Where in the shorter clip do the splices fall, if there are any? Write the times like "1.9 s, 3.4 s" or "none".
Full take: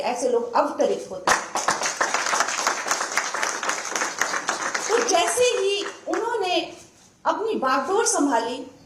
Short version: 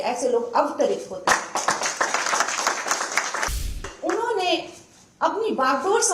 3.9 s